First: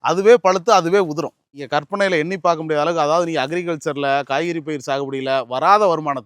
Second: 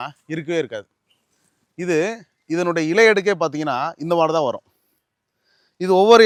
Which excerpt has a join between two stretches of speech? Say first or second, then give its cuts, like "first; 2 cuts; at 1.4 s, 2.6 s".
first; 1 cut; at 1.5 s